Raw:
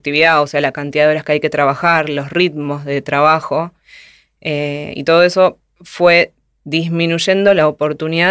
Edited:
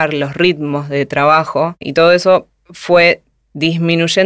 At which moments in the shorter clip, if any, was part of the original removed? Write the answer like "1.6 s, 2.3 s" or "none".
1.8 s